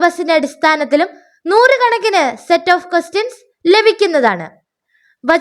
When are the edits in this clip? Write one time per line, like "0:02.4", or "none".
none